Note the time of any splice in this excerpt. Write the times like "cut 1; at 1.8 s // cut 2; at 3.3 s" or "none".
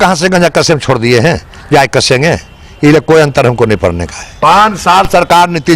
cut 1; at 4.4 s